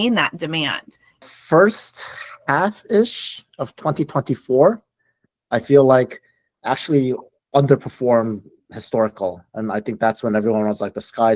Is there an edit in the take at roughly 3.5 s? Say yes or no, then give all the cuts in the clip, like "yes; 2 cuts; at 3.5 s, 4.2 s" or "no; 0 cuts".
no; 1 cut; at 1.2 s